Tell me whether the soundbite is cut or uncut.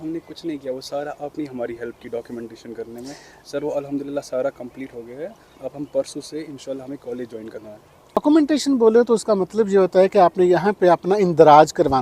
cut